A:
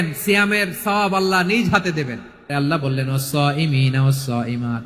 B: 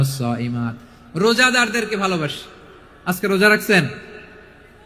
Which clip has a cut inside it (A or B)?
A